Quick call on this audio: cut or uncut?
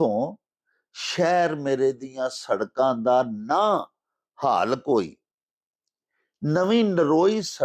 uncut